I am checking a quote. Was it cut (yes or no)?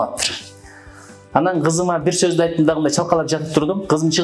no